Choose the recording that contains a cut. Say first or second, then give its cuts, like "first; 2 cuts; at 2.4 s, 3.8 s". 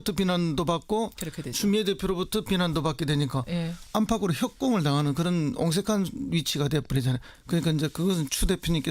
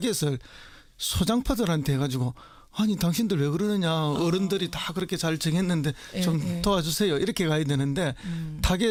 first; 1 cut; at 2.1 s